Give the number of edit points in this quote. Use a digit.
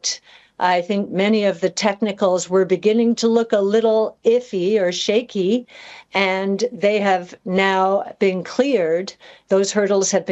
0